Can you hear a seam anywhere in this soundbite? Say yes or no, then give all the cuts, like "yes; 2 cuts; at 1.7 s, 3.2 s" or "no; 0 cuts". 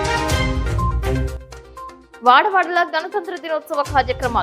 yes; 1 cut; at 2.0 s